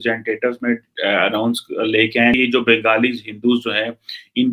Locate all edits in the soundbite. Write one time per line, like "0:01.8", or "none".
0:02.3